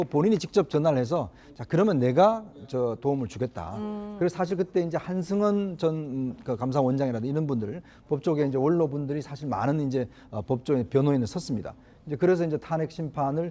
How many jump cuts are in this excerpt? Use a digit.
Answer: 1